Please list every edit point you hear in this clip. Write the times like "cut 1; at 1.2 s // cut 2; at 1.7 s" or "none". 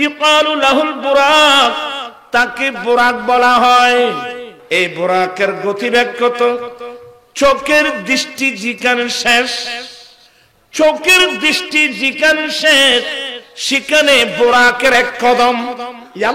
cut 1; at 4.5 s